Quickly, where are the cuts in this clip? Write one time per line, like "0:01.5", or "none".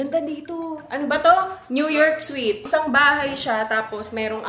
0:02.6